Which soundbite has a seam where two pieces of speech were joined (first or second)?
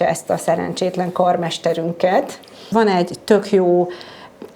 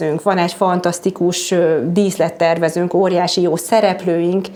first